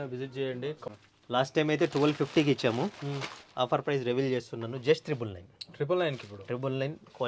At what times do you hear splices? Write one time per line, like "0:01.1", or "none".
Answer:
0:00.9